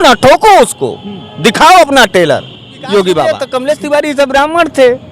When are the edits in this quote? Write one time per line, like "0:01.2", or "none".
0:03.3